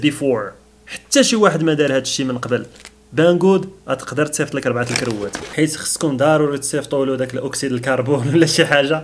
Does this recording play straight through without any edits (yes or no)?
no